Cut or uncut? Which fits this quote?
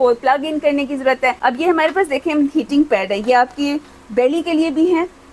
cut